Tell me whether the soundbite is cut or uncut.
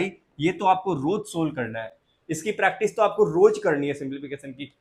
uncut